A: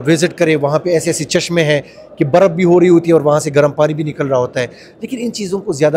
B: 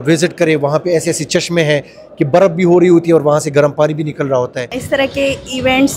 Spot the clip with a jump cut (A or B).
B